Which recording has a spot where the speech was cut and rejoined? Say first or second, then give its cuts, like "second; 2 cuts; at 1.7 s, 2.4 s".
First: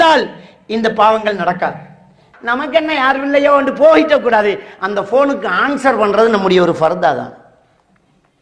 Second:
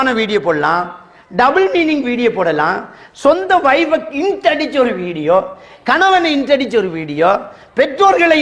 first; 1 cut; at 2.3 s